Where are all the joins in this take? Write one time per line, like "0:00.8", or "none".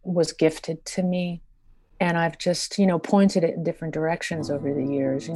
none